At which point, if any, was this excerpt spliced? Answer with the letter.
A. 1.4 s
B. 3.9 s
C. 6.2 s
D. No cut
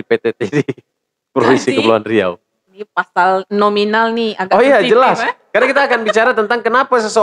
D